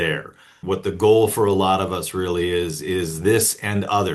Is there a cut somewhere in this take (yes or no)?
no